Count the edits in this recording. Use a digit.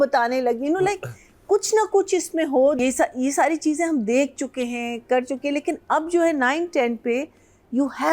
1